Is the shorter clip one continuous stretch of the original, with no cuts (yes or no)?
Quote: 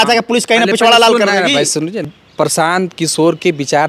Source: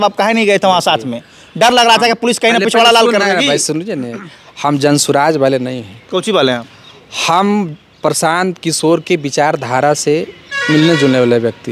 no